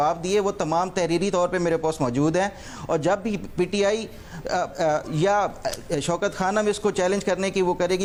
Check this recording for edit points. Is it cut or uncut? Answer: uncut